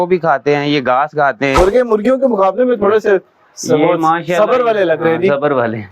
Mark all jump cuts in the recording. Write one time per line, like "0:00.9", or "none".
0:01.5